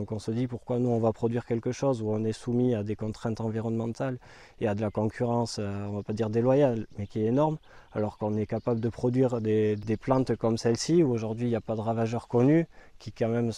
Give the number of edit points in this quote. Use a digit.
1